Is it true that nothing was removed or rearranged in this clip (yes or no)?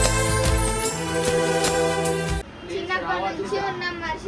no